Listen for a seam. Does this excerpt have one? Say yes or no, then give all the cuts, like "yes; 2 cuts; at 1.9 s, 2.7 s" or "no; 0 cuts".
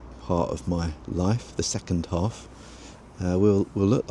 no; 0 cuts